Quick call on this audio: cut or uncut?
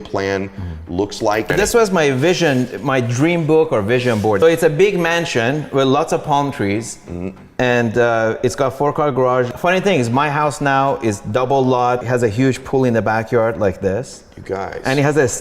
cut